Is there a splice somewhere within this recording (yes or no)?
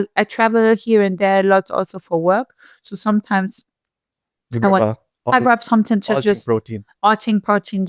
no